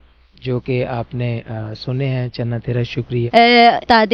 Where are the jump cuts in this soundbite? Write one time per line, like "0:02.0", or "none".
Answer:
0:03.2